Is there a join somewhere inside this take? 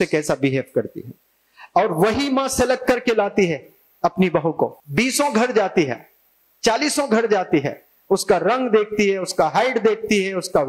yes; 1 cut; at 4.8 s

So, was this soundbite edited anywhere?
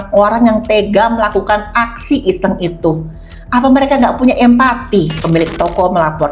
yes; 1 cut; at 5.2 s

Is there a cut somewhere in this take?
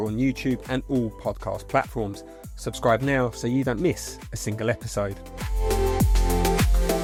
no; 0 cuts

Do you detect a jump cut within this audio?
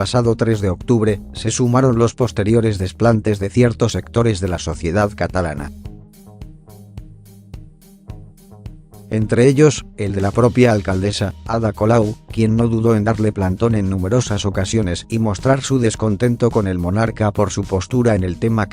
yes; 1 cut; at 11.3 s

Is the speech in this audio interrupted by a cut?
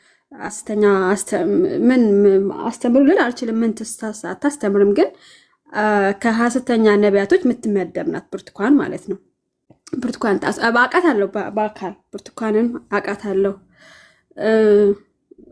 no; 0 cuts

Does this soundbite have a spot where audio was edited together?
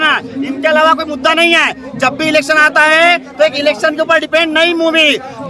no; 0 cuts

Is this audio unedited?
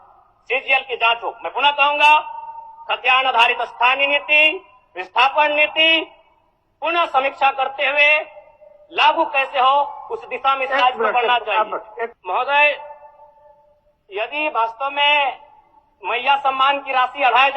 no; 1 cut; at 12.2 s

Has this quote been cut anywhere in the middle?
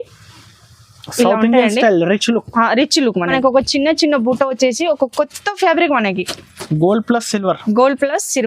yes; 1 cut; at 3.3 s

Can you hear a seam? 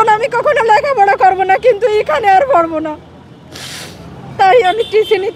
no; 0 cuts

